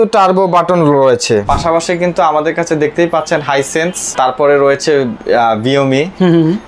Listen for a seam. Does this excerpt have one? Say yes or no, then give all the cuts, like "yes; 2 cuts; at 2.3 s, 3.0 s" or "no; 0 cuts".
yes; 2 cuts; at 1.5 s, 4.0 s